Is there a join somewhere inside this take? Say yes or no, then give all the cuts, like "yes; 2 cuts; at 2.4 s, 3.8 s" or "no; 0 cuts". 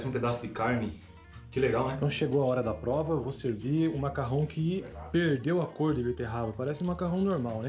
yes; 1 cut; at 2.0 s